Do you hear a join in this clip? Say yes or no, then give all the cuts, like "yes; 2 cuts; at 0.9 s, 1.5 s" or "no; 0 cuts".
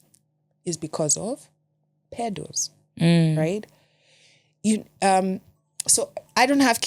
no; 0 cuts